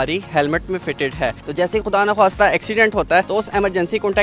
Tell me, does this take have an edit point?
yes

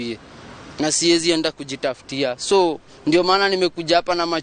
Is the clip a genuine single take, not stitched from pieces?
yes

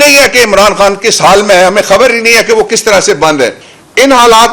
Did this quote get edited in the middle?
yes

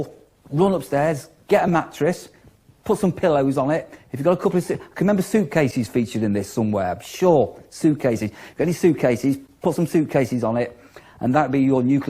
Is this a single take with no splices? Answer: yes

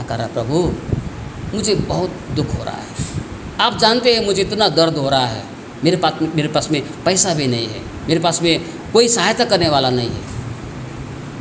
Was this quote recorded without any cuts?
yes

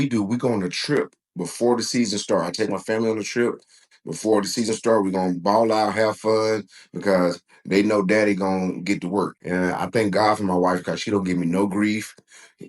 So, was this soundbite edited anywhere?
yes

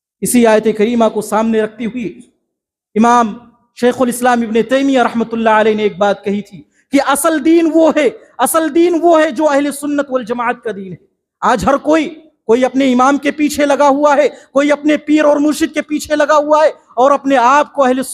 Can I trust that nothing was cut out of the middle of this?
yes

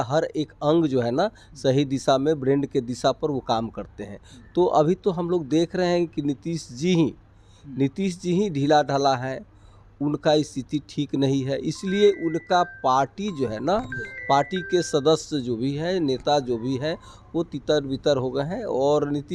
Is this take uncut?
yes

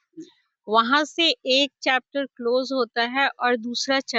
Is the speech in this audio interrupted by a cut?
no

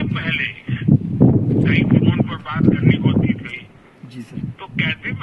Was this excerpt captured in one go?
yes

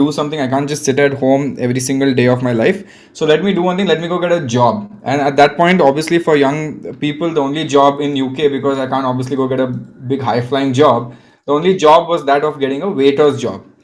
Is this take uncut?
yes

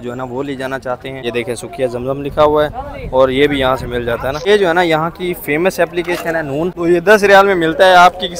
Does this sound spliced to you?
yes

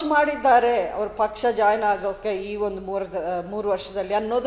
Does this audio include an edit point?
no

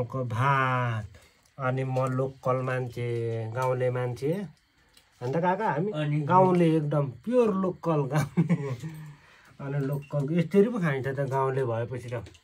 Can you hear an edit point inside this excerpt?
no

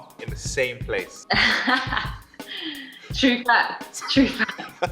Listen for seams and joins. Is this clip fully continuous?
yes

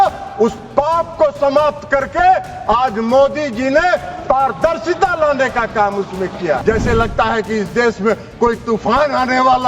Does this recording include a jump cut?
yes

